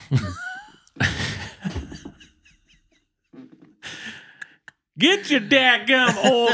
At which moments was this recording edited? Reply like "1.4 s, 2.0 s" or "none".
none